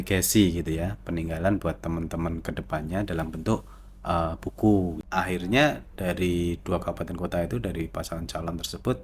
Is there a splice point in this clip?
yes; 1 cut; at 5.0 s

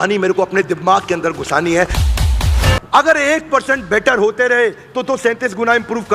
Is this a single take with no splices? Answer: no; 1 cut; at 2.3 s

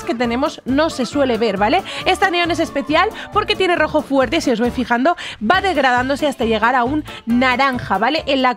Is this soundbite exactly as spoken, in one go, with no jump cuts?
yes; 0 cuts

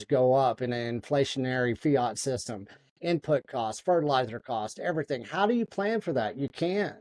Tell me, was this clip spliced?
no; 0 cuts

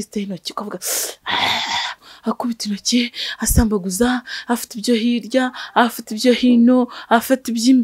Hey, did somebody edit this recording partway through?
yes; 1 cut; at 2.1 s

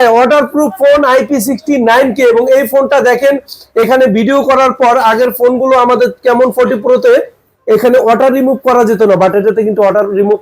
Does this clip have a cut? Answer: no; 0 cuts

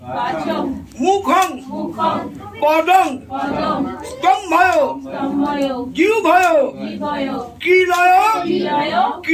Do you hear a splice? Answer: no; 0 cuts

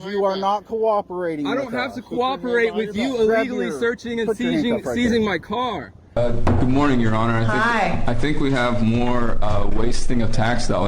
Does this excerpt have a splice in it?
yes; 1 cut; at 6.2 s

